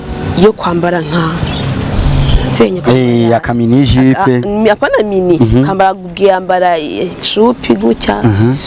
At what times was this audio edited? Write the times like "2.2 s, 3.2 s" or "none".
none